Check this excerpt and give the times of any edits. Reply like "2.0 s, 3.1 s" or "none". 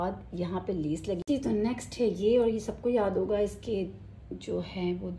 1.2 s